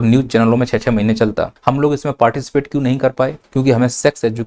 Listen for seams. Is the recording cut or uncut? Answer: cut